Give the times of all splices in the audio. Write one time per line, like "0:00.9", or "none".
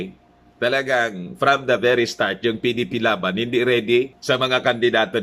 0:04.2